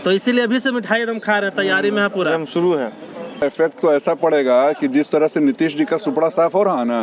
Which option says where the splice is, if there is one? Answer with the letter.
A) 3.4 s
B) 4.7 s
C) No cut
A